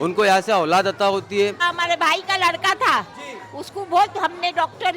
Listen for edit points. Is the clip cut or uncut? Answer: cut